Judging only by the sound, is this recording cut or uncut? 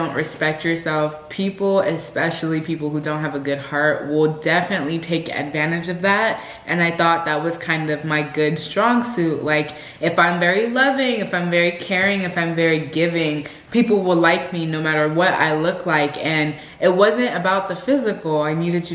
uncut